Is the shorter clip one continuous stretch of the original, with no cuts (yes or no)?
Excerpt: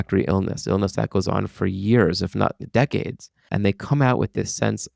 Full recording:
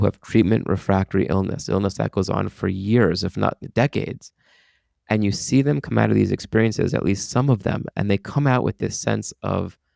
no